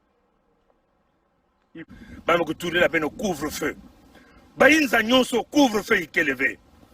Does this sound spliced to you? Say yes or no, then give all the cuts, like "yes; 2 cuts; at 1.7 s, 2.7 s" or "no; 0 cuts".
yes; 1 cut; at 1.8 s